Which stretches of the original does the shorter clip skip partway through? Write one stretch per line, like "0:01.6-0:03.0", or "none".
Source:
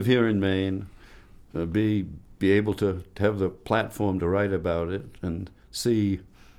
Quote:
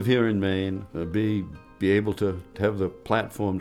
0:00.9-0:01.5